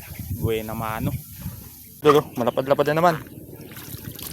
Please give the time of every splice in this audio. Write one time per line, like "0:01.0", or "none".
0:02.0